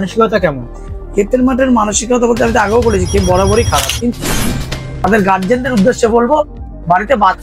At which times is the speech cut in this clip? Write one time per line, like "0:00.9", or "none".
0:04.5